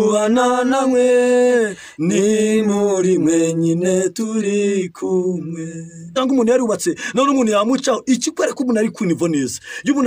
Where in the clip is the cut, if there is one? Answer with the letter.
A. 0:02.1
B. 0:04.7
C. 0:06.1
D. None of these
C